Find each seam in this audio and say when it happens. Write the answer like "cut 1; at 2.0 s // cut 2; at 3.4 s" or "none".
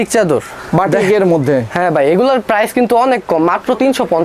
none